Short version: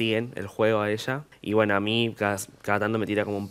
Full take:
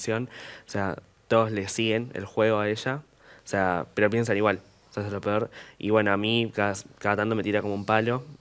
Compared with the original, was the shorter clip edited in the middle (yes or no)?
yes